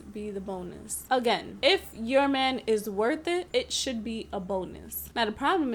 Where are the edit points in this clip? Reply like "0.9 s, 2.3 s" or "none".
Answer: none